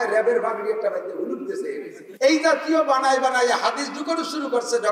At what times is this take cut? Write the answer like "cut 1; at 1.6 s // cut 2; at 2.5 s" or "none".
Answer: cut 1; at 2.0 s